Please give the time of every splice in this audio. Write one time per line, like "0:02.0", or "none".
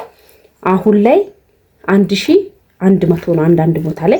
none